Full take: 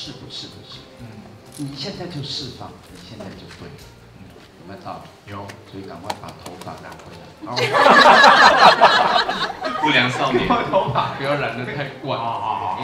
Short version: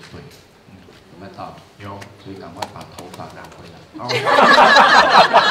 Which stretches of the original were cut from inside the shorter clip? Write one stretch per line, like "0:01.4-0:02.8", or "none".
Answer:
none